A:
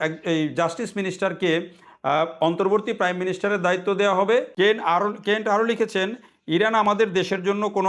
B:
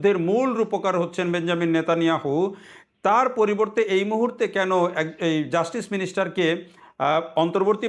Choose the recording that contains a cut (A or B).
A